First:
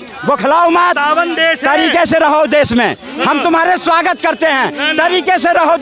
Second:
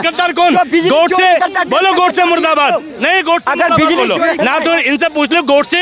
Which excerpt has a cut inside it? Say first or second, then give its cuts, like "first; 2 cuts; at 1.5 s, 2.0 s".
second; 1 cut; at 4.4 s